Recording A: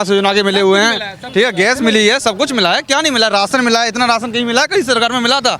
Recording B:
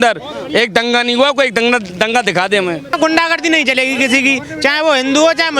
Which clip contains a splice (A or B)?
B